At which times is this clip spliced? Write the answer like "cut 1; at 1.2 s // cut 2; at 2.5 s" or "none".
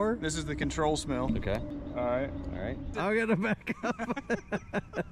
cut 1; at 1.7 s // cut 2; at 2.9 s